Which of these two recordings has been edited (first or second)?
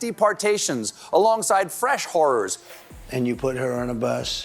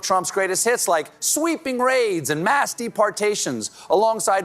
first